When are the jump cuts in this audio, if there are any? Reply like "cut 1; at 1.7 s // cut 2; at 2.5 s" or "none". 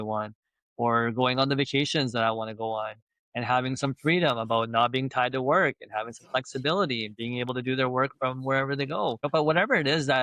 cut 1; at 9.3 s

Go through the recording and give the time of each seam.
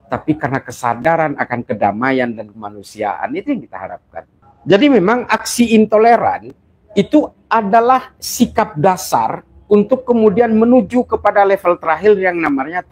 none

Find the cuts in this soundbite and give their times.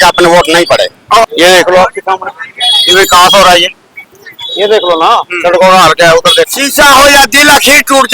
cut 1; at 1.2 s // cut 2; at 6.5 s

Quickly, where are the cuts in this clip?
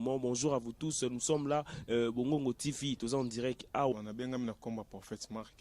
cut 1; at 3.9 s

